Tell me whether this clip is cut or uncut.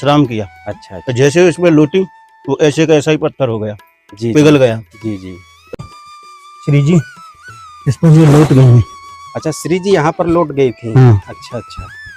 cut